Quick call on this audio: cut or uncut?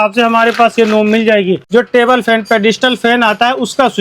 cut